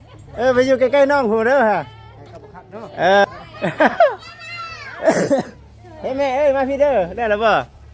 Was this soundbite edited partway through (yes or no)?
no